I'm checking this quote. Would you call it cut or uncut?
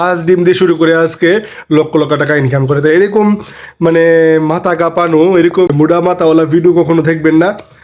cut